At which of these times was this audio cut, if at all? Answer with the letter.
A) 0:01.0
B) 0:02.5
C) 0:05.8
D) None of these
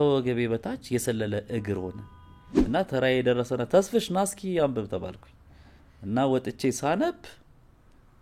B